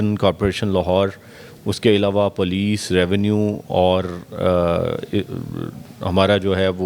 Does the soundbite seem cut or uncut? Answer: uncut